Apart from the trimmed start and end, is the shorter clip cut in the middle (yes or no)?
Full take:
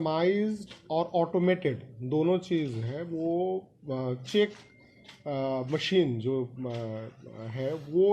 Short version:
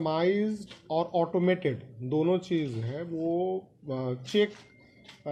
no